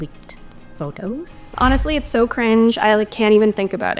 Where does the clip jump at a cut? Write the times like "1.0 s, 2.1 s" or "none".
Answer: none